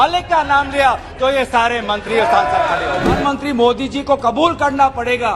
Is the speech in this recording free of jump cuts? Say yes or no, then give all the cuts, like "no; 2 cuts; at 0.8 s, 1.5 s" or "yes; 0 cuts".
no; 1 cut; at 3.2 s